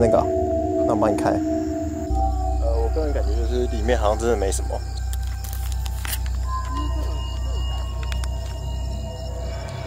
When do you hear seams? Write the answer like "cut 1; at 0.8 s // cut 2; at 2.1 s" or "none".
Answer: none